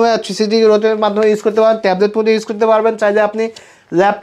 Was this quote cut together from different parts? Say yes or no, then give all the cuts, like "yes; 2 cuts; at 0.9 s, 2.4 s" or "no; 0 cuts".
no; 0 cuts